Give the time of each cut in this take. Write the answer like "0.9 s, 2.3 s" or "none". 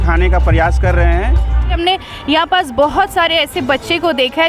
1.8 s